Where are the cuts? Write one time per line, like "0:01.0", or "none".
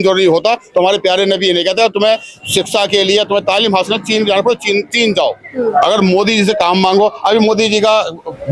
0:05.6